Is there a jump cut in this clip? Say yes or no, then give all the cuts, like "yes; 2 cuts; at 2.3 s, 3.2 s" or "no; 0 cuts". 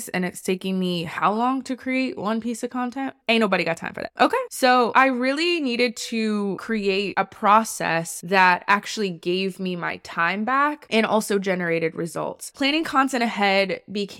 yes; 1 cut; at 12.5 s